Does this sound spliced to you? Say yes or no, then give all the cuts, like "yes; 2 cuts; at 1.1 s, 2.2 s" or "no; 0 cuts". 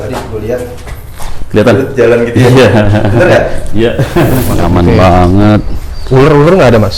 yes; 1 cut; at 4.5 s